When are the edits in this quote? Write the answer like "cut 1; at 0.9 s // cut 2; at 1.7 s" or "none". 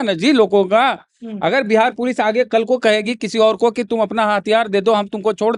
none

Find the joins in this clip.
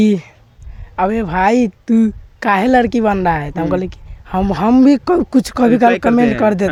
none

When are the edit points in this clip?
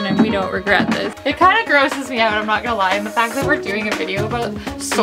cut 1; at 1.1 s

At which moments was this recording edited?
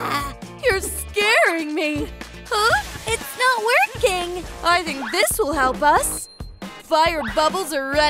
cut 1; at 6.4 s

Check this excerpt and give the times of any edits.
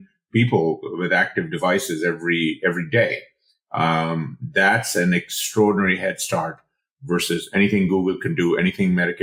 none

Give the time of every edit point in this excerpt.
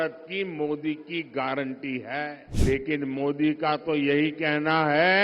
cut 1; at 2.5 s

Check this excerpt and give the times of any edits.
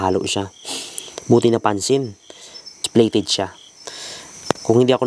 cut 1; at 2.8 s

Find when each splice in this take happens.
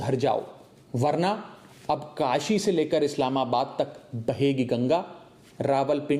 none

